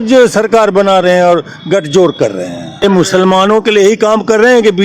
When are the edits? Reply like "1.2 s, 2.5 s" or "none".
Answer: 2.8 s